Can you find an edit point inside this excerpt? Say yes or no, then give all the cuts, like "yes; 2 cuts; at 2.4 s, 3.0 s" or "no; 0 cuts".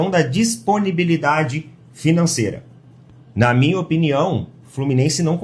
no; 0 cuts